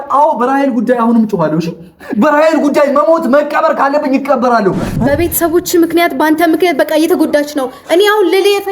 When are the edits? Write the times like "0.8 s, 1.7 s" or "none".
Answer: 5.0 s